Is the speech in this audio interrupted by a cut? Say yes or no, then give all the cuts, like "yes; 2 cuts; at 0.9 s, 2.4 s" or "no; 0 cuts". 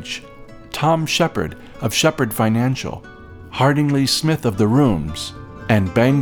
no; 0 cuts